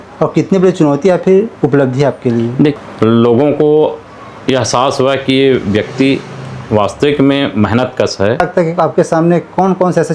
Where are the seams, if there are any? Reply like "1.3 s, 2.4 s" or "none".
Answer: 2.8 s, 8.4 s